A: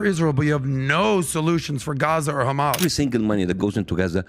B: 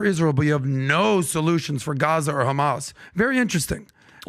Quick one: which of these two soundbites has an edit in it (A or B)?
A